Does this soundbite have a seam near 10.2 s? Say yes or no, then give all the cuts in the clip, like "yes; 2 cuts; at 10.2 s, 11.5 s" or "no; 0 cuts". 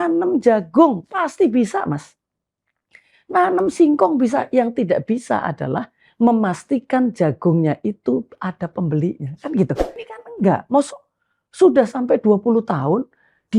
yes; 1 cut; at 10.2 s